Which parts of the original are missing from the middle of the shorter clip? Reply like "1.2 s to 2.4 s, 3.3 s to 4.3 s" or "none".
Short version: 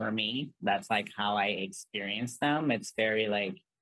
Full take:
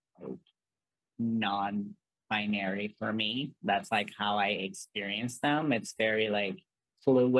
none